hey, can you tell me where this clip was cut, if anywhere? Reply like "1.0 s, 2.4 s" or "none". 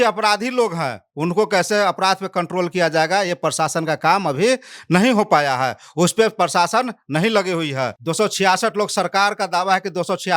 8.0 s